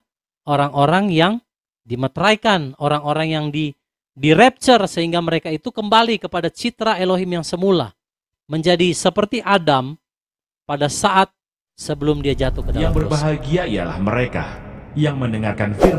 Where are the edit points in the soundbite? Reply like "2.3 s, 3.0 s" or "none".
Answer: 12.7 s